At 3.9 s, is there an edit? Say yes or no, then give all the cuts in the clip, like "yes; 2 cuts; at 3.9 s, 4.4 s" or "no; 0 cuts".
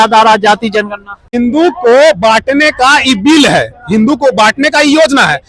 no; 1 cut; at 1.3 s